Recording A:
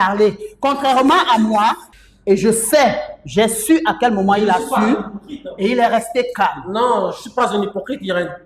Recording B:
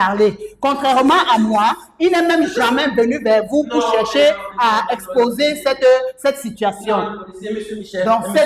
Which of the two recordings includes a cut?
A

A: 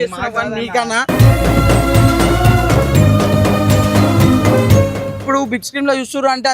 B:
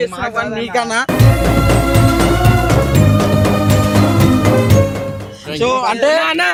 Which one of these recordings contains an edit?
A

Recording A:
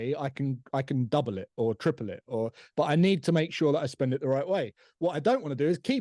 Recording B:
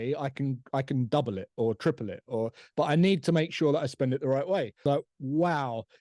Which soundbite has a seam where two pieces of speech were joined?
B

